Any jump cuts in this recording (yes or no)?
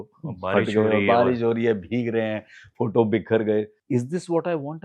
yes